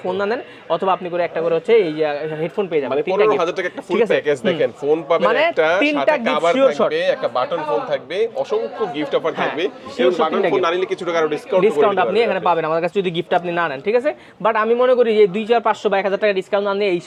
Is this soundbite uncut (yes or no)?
yes